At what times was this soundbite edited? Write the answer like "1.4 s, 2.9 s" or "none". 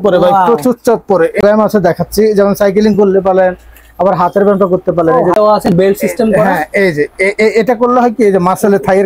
1.4 s, 5.3 s